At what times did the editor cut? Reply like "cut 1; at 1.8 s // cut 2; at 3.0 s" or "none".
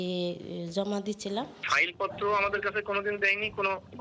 cut 1; at 1.5 s